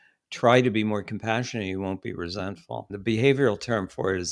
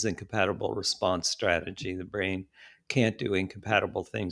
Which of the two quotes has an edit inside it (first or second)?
first